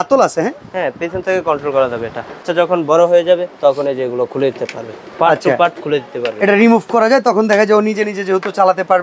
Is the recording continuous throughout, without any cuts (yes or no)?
no